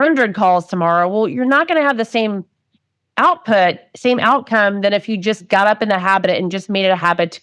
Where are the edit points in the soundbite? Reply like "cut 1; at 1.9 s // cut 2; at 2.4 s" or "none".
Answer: none